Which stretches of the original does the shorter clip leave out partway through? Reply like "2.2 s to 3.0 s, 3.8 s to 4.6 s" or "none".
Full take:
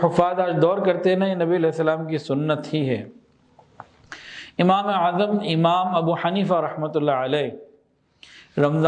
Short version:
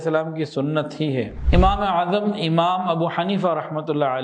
3.1 s to 4.4 s